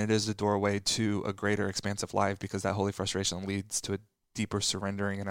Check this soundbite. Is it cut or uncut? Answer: uncut